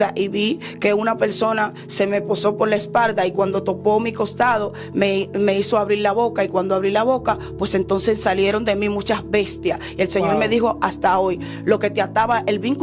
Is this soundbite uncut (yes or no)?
yes